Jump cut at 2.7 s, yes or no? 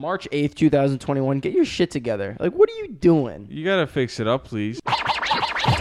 no